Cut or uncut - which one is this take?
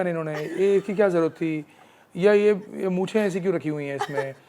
uncut